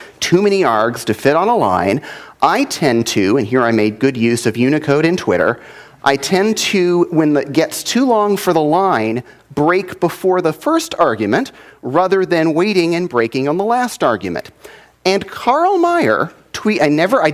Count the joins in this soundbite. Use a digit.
1